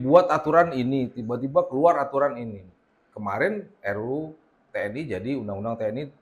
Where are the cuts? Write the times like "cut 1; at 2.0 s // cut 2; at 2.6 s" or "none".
none